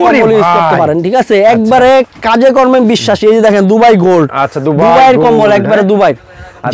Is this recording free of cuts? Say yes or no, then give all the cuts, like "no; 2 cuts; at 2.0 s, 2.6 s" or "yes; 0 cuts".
yes; 0 cuts